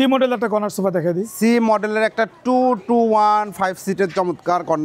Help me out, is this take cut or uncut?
uncut